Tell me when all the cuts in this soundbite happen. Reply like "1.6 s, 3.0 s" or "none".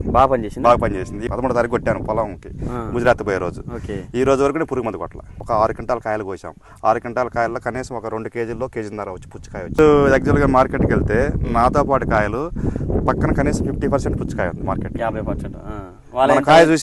1.2 s, 5.4 s, 9.8 s